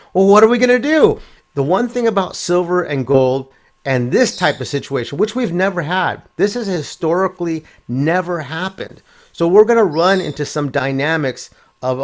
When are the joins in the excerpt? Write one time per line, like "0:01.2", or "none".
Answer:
0:01.4